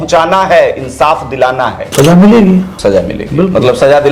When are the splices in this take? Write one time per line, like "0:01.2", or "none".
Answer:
0:01.9
0:02.7